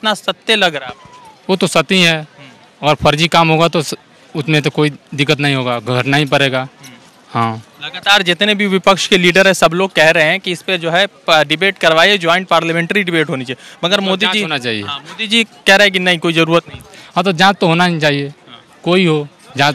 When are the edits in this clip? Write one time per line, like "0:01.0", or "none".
none

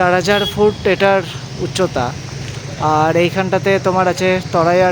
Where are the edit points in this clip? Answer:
none

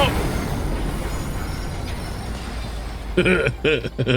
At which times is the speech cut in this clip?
0:03.1

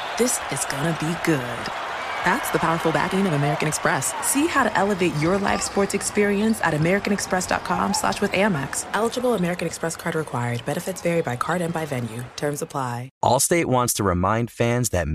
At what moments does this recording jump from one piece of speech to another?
0:13.1

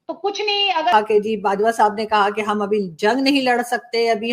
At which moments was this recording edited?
0:00.9

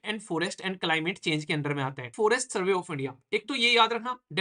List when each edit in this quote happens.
0:02.1

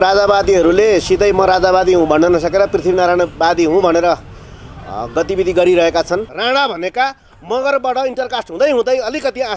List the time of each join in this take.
0:06.3

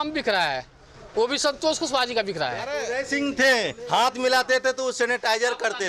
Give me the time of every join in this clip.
0:02.8

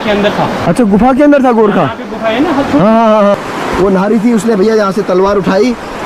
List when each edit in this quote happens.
0:03.3

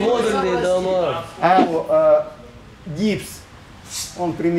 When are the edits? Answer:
0:01.7

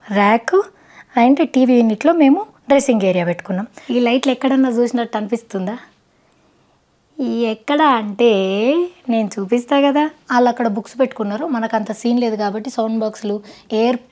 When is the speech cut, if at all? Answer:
0:03.8
0:10.2

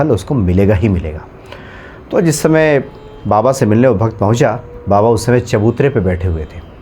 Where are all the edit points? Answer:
none

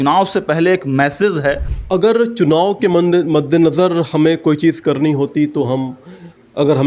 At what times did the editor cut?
0:01.7

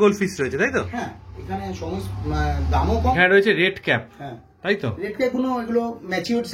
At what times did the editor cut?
0:03.1

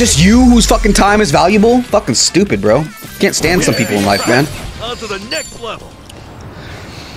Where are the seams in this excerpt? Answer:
none

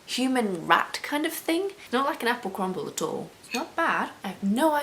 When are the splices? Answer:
0:01.8
0:03.3

